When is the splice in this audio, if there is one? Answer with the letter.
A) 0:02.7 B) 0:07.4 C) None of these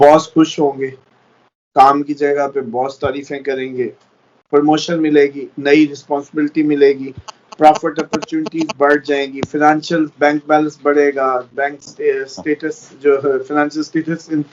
C